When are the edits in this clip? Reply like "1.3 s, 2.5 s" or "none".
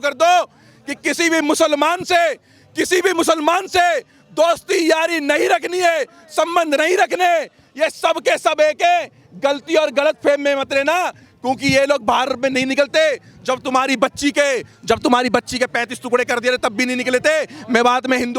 none